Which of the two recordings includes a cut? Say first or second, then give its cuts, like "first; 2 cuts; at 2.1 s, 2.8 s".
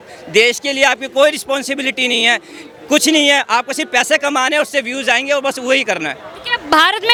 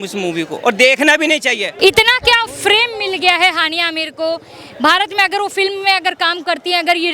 second; 1 cut; at 1.7 s